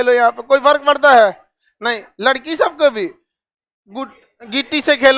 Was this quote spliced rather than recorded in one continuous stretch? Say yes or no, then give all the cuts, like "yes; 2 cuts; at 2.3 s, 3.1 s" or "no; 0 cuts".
no; 0 cuts